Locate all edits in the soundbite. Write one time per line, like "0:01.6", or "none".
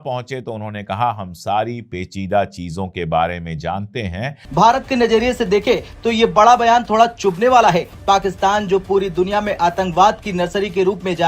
0:04.4